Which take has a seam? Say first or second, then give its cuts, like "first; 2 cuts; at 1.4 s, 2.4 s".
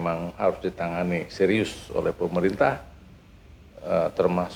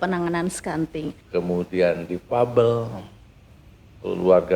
second; 1 cut; at 1.2 s